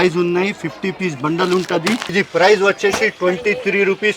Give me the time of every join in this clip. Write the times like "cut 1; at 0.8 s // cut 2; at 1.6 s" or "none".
cut 1; at 2.1 s